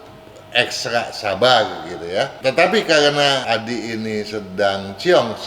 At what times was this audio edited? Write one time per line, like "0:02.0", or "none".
0:02.3
0:03.4